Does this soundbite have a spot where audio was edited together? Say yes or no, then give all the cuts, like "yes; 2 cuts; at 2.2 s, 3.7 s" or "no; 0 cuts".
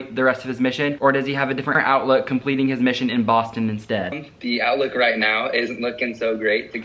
no; 0 cuts